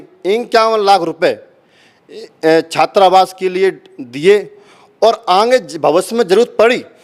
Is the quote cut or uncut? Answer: uncut